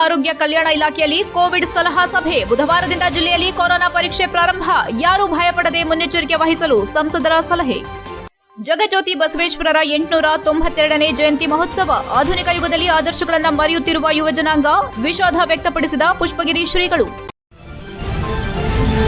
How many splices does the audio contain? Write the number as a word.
one